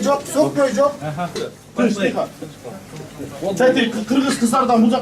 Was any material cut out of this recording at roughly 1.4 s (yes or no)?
yes